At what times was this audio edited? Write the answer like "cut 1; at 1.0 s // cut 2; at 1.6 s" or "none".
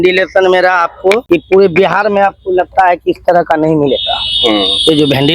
cut 1; at 1.2 s